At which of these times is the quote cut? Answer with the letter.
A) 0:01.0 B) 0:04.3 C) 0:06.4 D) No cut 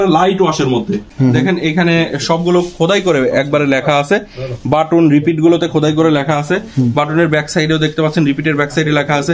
A